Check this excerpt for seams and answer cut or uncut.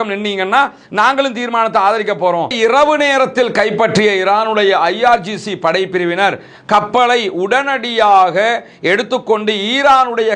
cut